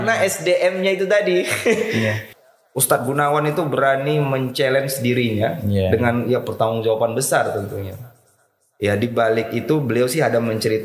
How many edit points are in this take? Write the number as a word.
one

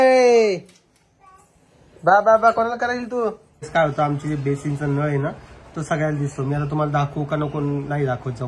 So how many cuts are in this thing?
one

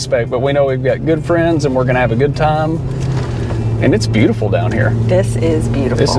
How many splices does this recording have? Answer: zero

